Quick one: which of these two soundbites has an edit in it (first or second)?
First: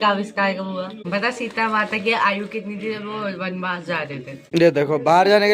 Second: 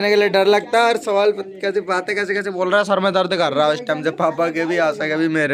first